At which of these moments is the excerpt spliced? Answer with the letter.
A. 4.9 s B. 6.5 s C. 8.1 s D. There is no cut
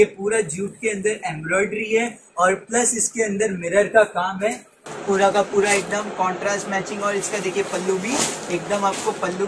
A